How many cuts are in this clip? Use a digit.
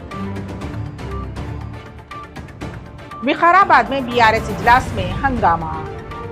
1